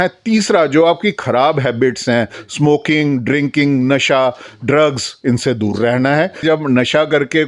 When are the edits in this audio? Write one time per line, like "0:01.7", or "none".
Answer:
0:06.4

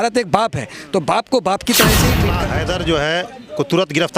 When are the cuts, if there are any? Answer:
0:02.3

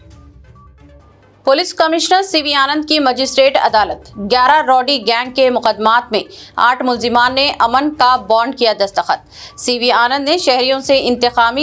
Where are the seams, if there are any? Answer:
0:01.0

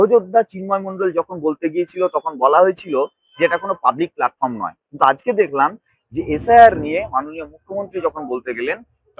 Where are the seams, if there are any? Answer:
none

